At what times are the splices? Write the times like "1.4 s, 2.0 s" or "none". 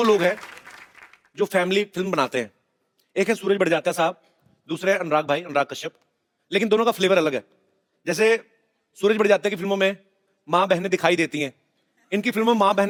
none